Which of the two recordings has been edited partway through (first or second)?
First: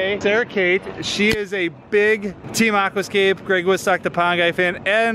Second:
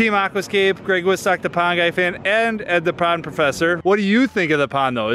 second